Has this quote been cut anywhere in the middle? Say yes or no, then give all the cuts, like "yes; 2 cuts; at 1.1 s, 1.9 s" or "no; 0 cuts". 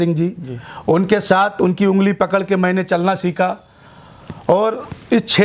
no; 0 cuts